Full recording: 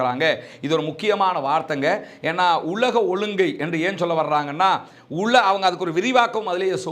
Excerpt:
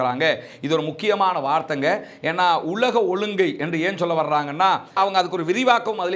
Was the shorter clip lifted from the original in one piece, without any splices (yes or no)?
no